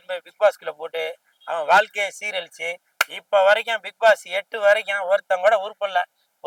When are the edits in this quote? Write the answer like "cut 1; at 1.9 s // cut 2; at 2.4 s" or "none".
none